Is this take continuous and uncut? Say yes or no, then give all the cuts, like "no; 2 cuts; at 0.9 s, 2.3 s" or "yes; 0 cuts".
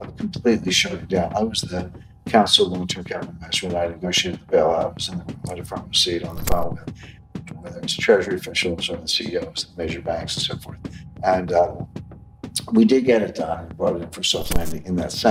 yes; 0 cuts